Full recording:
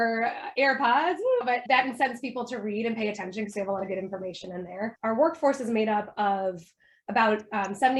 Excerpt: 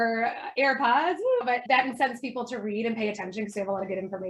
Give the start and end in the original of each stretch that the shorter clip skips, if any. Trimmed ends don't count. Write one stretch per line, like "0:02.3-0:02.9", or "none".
none